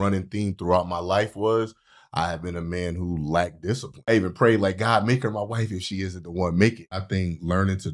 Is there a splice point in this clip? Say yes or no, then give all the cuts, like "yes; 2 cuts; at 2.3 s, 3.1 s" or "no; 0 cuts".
yes; 2 cuts; at 4.1 s, 7.0 s